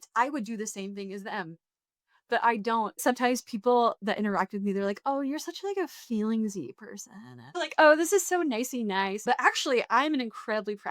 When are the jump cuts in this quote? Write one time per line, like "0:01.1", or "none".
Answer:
0:03.0
0:07.5
0:09.2